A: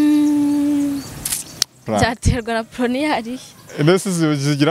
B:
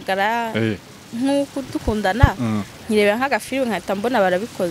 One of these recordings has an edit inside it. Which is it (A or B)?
A